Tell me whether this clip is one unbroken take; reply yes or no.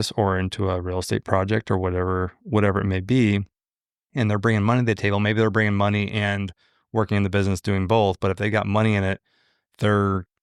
yes